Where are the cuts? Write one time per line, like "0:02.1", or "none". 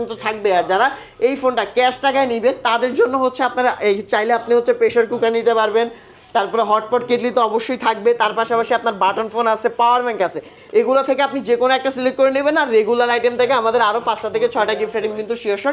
none